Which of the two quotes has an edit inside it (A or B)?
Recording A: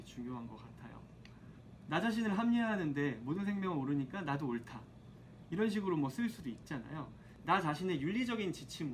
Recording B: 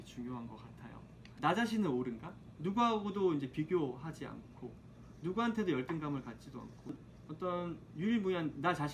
B